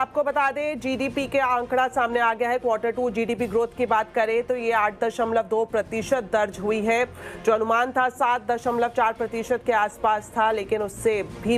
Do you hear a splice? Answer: no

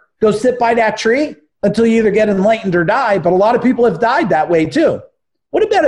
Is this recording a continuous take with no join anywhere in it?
yes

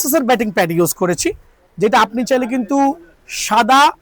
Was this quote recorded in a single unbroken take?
yes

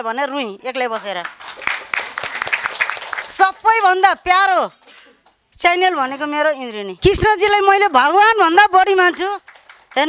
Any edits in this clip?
no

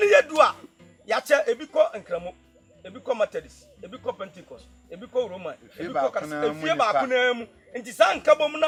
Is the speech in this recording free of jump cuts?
yes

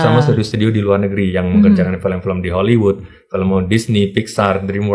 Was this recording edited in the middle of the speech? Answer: no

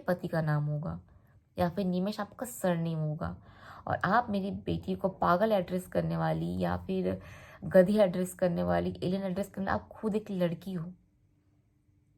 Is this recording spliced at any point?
no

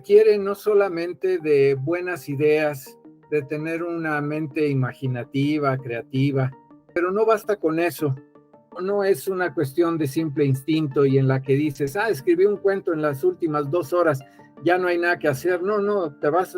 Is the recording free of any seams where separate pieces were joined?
no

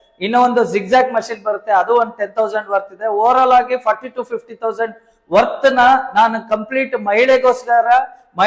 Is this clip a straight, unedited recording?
yes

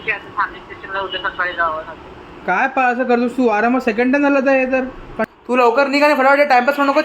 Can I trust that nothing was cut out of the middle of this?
no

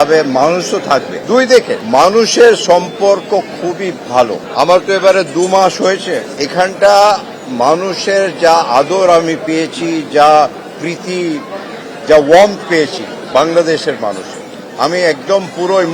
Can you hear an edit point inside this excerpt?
yes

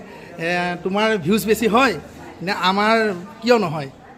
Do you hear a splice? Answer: no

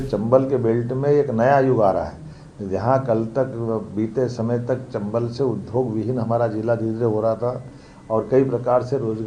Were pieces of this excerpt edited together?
no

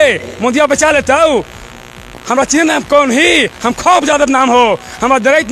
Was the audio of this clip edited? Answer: no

